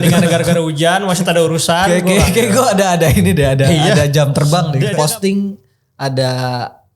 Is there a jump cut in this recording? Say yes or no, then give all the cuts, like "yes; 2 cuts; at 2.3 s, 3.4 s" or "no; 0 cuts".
yes; 1 cut; at 4.9 s